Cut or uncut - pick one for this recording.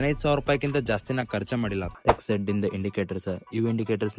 cut